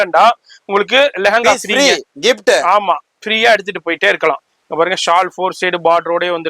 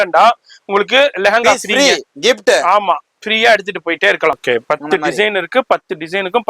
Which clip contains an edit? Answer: second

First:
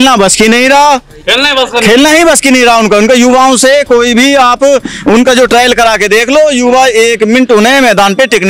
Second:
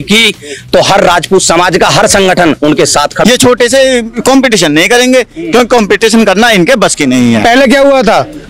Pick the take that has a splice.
second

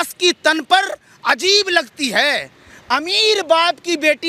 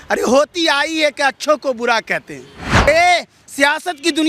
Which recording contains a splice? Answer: second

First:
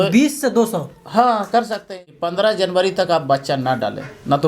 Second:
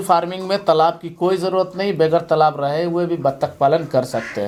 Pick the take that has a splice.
first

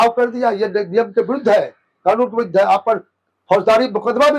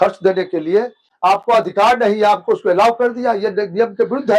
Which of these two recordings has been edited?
second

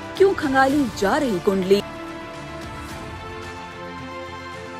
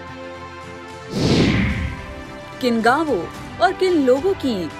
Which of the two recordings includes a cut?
second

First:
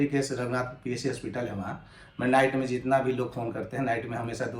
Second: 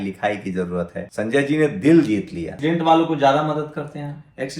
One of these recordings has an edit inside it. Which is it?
second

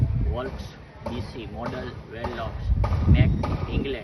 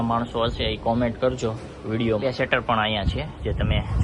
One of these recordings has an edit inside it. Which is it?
second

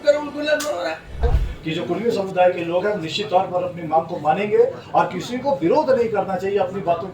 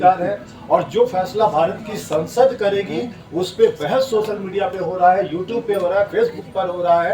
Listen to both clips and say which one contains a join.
first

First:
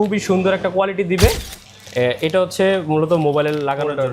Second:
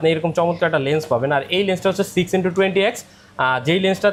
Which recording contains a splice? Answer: first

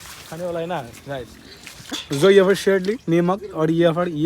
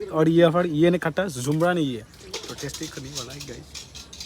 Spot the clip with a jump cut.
first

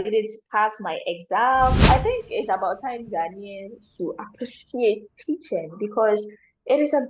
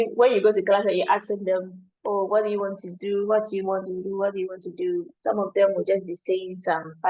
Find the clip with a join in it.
first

